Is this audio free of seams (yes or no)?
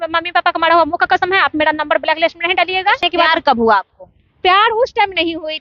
no